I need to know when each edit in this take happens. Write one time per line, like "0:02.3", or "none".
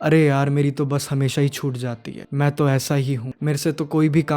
0:02.1
0:03.3